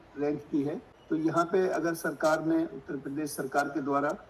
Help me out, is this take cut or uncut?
cut